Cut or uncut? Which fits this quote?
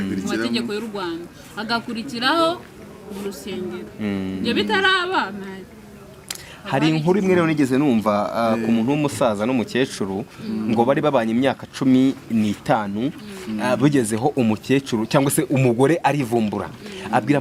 uncut